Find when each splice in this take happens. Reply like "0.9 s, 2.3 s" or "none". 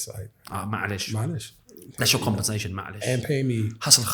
none